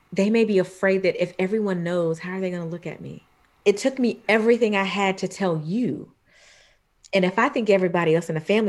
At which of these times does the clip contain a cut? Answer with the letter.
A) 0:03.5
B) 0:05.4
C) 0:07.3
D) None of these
A